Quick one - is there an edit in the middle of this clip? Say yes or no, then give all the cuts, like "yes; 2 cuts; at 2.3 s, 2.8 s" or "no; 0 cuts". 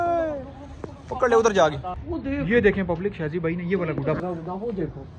yes; 2 cuts; at 2.0 s, 4.2 s